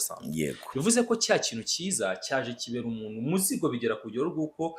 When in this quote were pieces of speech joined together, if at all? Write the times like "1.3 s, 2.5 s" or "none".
none